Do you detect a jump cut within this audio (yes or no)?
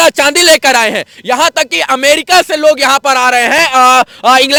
no